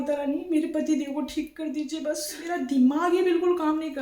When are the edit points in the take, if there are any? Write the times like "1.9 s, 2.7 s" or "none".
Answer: 2.4 s